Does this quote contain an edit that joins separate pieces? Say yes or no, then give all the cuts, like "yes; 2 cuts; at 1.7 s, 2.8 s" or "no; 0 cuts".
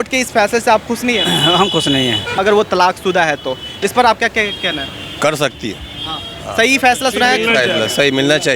yes; 1 cut; at 2.3 s